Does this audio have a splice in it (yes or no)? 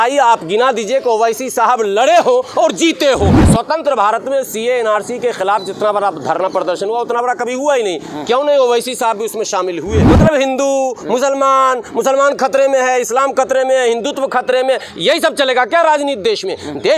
yes